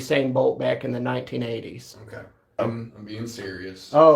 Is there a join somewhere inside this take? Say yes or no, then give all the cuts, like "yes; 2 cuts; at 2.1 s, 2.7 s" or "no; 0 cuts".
yes; 1 cut; at 2.6 s